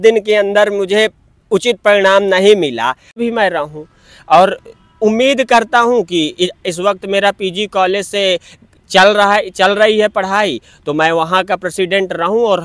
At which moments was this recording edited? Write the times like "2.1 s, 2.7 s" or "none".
3.2 s